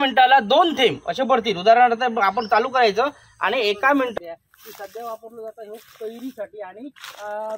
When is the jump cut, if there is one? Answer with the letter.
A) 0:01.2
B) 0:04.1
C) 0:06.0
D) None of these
B